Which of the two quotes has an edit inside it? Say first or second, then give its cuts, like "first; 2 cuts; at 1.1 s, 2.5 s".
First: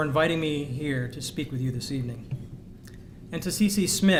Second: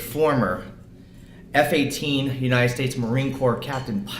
second; 1 cut; at 2.0 s